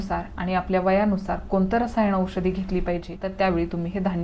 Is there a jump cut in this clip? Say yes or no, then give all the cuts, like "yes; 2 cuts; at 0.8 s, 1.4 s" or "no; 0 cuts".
yes; 1 cut; at 3.2 s